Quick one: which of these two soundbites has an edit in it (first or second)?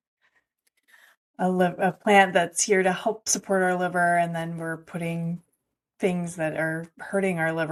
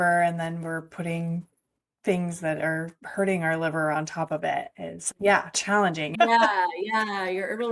second